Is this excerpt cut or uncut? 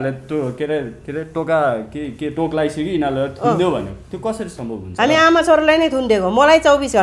uncut